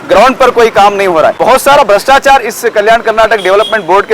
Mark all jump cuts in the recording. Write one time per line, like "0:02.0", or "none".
0:01.4